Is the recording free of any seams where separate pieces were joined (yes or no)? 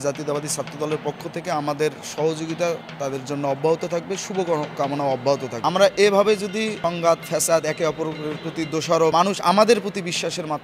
no